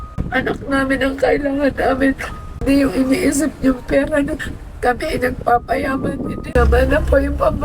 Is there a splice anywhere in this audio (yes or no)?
yes